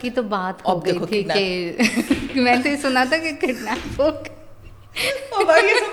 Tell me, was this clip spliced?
no; 0 cuts

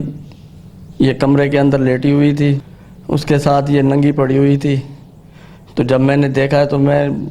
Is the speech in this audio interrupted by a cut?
yes; 1 cut; at 2.6 s

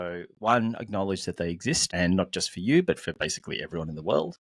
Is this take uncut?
no; 1 cut; at 1.9 s

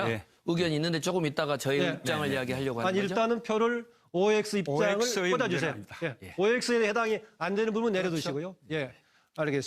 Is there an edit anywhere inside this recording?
yes; 1 cut; at 6.3 s

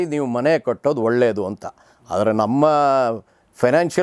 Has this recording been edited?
no; 0 cuts

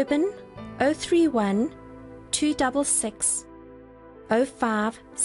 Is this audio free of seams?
yes; 0 cuts

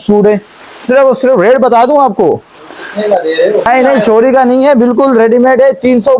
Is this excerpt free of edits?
no; 1 cut; at 3.7 s

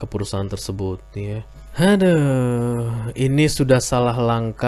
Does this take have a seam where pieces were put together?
yes; 1 cut; at 1.6 s

